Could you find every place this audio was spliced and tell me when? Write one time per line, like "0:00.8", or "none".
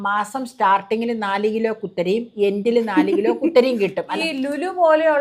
0:04.1